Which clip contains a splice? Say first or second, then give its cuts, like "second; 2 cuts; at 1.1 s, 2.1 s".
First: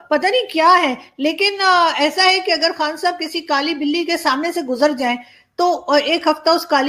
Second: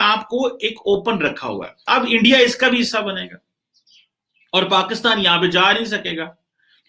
second; 1 cut; at 1.7 s